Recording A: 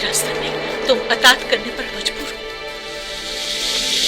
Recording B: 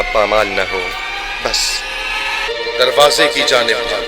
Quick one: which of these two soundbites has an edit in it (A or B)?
B